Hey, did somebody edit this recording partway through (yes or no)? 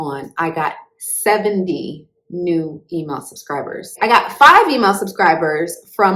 yes